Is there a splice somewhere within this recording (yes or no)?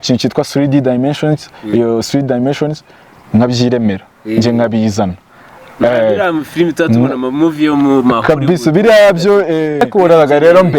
yes